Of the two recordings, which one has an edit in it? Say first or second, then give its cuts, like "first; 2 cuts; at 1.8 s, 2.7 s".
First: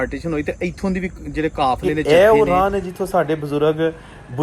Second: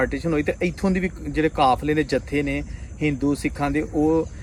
first; 1 cut; at 1.9 s